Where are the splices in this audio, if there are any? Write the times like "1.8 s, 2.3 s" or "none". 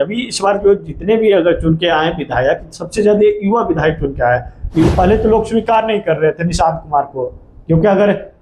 4.9 s